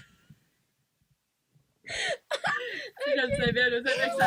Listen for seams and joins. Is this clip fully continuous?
yes; 0 cuts

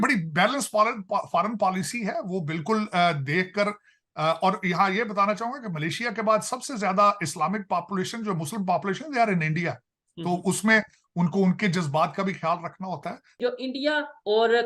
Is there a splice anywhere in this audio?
yes; 1 cut; at 13.4 s

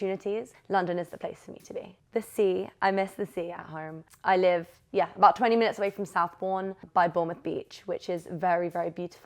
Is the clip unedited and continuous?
no; 2 cuts; at 4.0 s, 6.8 s

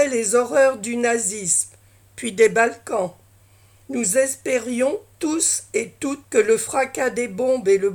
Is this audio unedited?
no; 1 cut; at 6.2 s

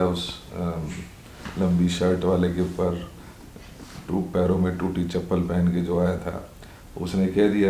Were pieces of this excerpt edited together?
no; 0 cuts

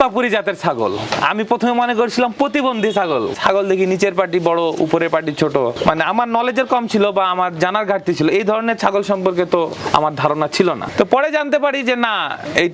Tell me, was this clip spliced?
no; 0 cuts

